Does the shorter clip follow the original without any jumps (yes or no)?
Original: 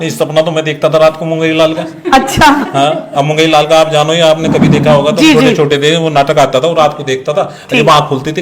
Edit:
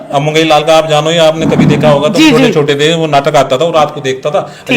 yes